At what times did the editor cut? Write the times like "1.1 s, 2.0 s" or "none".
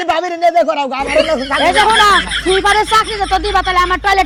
none